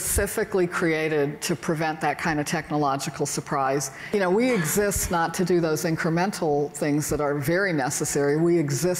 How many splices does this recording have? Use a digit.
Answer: 1